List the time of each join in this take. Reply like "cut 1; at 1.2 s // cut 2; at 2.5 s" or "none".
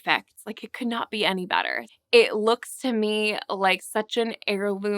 cut 1; at 1.8 s